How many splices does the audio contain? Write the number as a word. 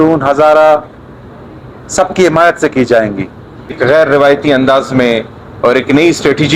one